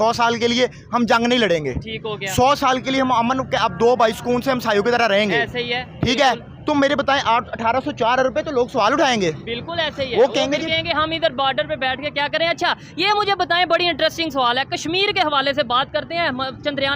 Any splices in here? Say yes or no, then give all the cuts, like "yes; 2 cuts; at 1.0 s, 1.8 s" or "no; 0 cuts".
no; 0 cuts